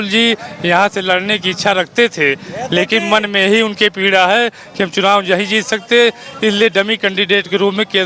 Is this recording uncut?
yes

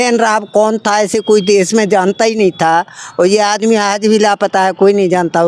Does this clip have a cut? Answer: no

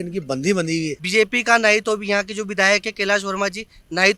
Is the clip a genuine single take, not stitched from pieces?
no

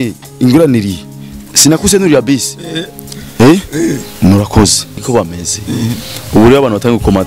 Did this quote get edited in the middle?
yes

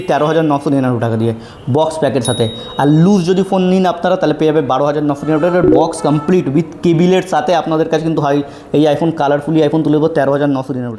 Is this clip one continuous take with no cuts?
yes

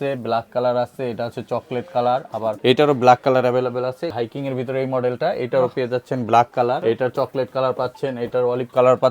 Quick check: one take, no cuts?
no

